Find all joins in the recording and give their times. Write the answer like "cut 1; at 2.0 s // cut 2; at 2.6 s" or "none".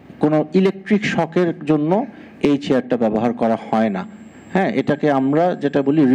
none